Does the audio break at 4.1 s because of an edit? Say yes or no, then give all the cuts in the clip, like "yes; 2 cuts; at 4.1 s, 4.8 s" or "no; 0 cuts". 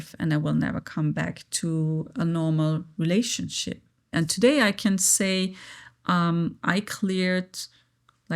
yes; 1 cut; at 4.1 s